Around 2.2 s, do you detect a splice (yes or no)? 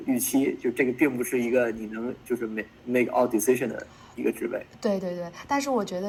no